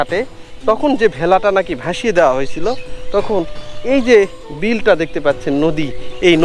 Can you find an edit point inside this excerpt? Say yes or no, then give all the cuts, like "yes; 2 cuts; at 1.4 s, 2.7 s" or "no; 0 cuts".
no; 0 cuts